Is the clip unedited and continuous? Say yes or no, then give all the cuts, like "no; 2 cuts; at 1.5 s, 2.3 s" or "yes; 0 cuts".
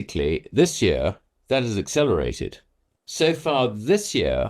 yes; 0 cuts